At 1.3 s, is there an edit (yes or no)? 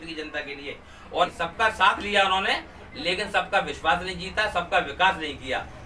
yes